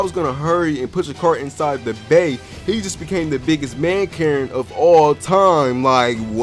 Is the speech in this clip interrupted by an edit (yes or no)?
no